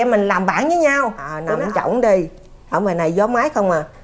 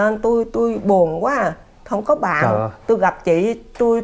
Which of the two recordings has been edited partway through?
first; 1 cut; at 1.4 s

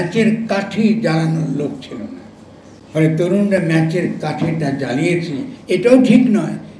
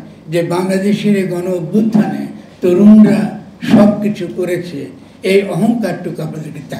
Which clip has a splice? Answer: first; 1 cut; at 5.5 s

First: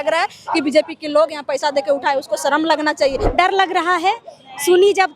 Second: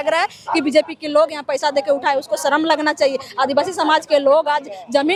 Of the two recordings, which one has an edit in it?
first; 1 cut; at 3.2 s

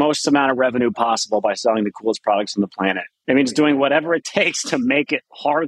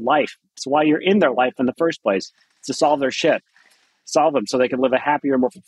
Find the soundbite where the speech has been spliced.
first; 1 cut; at 3.1 s

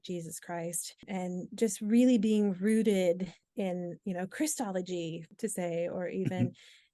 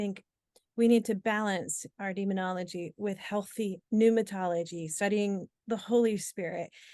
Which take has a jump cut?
first; 3 cuts; at 1.0 s, 3.4 s, 5.2 s

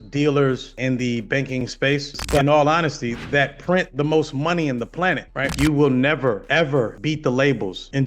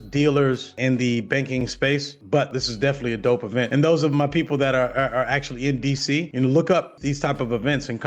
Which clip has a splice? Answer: first; 2 cuts; at 2.4 s, 5.5 s

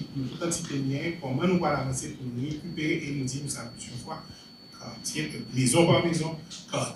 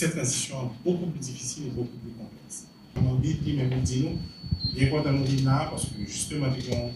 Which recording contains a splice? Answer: second; 1 cut; at 3.2 s

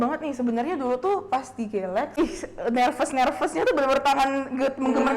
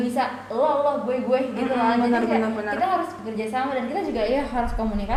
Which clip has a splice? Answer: first; 1 cut; at 2.1 s

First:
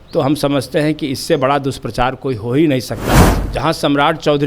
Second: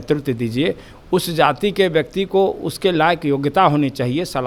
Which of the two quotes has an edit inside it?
first; 1 cut; at 3.4 s

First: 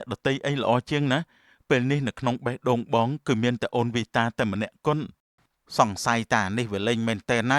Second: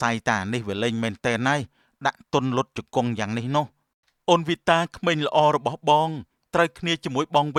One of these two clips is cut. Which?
first; 1 cut; at 5.1 s

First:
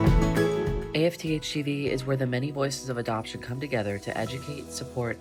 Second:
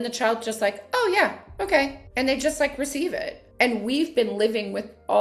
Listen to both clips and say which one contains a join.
second; 2 cuts; at 2.0 s, 3.4 s

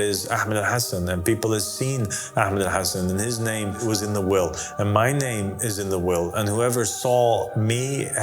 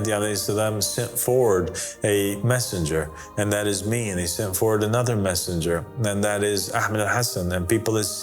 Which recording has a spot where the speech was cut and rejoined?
first; 1 cut; at 3.8 s

